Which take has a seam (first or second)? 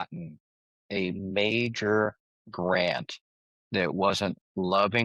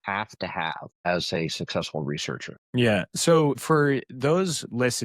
second